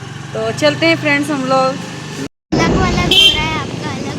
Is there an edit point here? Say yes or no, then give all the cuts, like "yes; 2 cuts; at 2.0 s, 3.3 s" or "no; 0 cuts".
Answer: yes; 1 cut; at 2.2 s